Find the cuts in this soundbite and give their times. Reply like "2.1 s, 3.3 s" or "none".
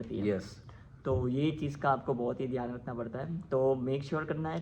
none